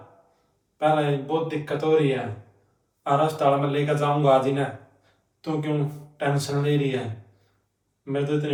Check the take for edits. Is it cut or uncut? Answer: uncut